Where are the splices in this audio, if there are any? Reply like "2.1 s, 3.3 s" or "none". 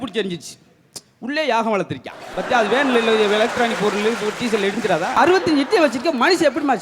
5.2 s